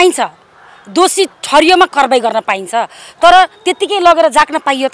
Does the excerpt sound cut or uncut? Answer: uncut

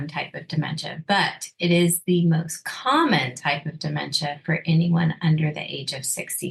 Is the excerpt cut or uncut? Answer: uncut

